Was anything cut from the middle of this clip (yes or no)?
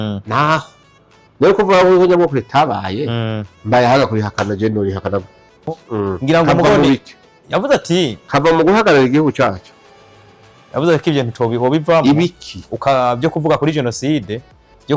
yes